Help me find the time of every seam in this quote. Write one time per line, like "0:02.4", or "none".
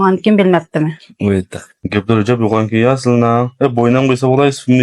none